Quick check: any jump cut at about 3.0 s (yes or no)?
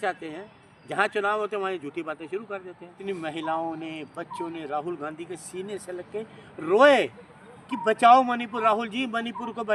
yes